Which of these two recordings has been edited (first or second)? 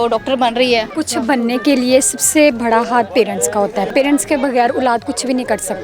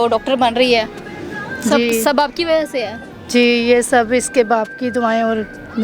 first